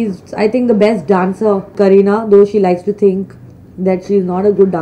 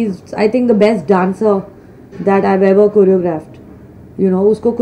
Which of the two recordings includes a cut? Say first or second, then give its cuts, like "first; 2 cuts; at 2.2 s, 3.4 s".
first; 1 cut; at 1.7 s